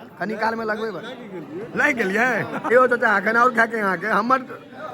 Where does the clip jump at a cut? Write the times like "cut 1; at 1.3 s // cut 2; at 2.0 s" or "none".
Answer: cut 1; at 2.7 s